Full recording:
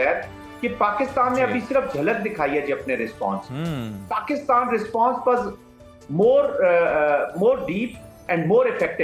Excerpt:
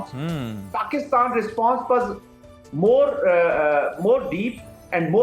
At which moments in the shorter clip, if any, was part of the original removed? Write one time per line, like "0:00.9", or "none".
none